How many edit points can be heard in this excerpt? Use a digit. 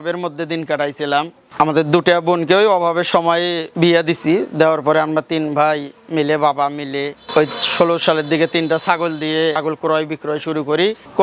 1